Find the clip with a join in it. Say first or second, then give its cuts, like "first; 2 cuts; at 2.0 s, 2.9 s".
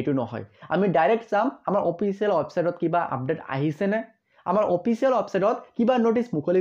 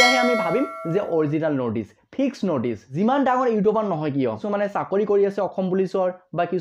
second; 2 cuts; at 2.9 s, 4.4 s